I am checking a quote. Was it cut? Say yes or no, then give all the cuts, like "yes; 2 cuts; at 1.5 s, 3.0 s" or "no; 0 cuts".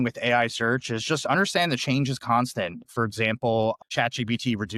no; 0 cuts